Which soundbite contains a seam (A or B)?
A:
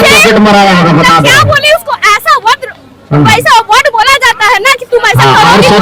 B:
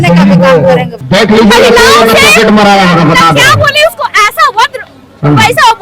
B